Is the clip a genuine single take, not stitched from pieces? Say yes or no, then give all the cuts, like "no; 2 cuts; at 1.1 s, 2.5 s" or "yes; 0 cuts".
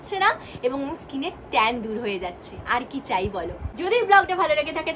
yes; 0 cuts